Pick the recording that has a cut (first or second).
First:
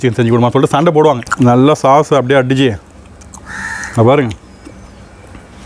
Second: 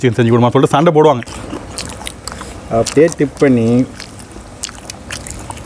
second